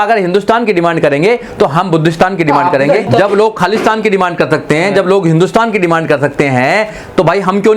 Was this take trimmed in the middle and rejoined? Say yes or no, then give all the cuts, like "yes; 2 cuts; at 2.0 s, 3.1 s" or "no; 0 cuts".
yes; 1 cut; at 3.1 s